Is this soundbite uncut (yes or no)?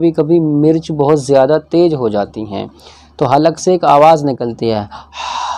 yes